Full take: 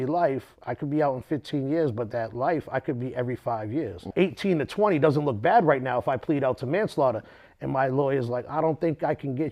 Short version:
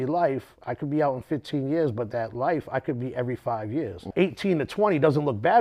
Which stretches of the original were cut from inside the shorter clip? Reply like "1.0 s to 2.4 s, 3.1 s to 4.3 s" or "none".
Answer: none